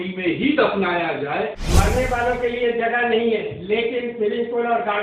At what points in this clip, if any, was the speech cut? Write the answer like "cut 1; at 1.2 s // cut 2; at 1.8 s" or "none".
cut 1; at 1.6 s